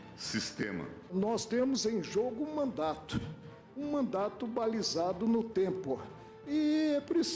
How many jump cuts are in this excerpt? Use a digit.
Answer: 1